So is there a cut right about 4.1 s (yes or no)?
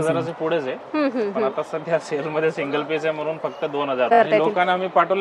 yes